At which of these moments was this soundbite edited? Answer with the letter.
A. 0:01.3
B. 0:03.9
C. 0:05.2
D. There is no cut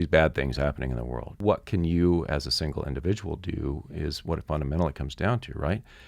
A